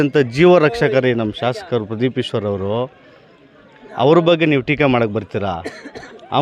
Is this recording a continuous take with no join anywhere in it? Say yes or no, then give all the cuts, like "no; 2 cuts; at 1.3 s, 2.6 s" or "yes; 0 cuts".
yes; 0 cuts